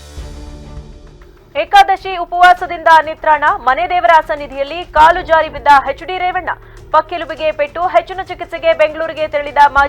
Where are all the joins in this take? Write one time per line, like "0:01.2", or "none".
0:00.9

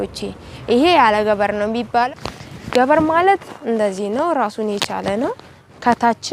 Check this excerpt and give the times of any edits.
0:02.1

